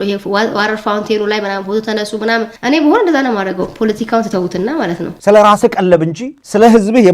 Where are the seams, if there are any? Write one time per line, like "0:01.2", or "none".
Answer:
0:05.1